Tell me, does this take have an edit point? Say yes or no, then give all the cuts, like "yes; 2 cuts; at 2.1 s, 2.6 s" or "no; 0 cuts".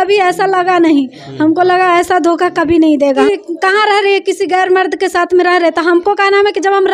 yes; 1 cut; at 3.2 s